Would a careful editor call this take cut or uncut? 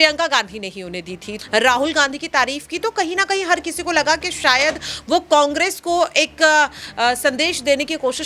cut